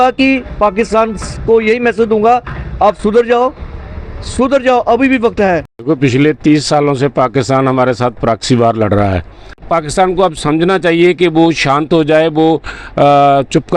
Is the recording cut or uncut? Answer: cut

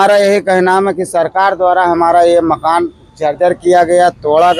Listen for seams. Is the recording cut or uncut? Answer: uncut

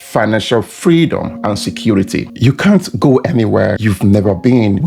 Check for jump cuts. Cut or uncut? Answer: cut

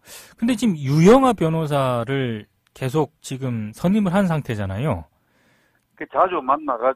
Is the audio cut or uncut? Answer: uncut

